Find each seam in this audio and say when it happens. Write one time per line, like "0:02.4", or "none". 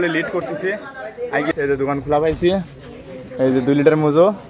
0:01.5